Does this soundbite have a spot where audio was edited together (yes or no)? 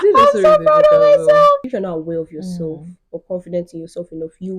yes